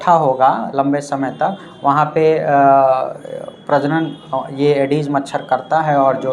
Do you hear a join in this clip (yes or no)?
no